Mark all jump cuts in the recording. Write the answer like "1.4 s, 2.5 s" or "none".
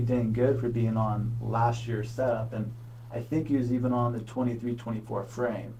none